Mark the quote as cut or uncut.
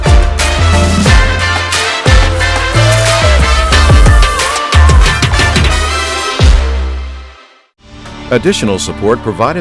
cut